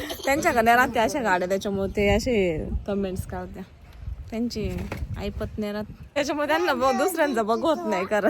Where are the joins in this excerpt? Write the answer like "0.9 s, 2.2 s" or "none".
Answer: 6.2 s